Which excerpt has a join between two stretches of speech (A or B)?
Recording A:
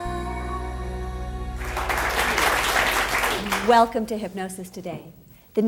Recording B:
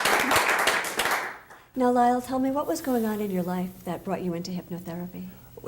B